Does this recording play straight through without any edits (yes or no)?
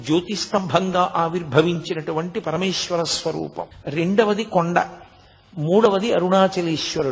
no